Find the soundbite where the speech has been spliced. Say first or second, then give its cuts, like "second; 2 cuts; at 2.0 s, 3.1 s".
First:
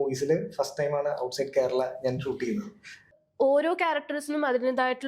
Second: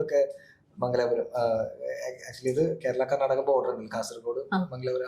first; 1 cut; at 3.2 s